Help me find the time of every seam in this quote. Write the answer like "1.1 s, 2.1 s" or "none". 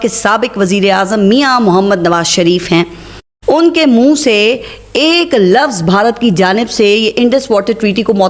none